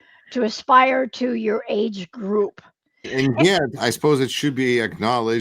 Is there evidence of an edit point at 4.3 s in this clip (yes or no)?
no